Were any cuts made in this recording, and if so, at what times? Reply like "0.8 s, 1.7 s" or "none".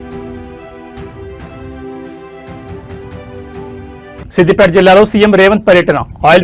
3.8 s